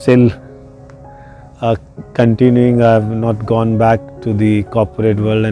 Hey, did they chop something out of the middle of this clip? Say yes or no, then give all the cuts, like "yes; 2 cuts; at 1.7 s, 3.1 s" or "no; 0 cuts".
no; 0 cuts